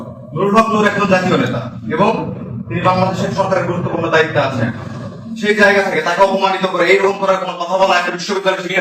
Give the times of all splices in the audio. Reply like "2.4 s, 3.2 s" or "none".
none